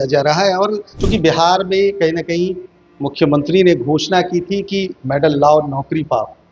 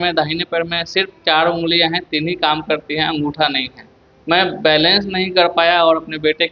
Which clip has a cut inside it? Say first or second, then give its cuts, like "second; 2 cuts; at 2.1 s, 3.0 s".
first; 1 cut; at 0.9 s